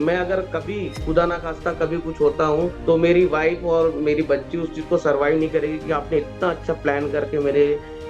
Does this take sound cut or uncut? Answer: cut